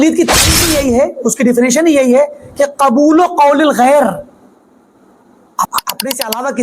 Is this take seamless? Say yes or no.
no